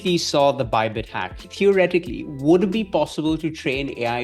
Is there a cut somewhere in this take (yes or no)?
yes